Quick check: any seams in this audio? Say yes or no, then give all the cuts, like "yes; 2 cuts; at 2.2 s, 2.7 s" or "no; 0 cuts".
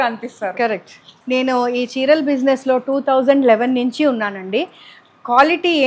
yes; 1 cut; at 1.1 s